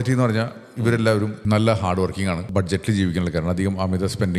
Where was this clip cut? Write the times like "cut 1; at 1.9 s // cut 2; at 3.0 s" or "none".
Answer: cut 1; at 1.4 s // cut 2; at 2.4 s